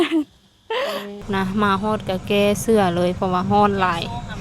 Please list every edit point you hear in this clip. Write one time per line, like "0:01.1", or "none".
0:01.2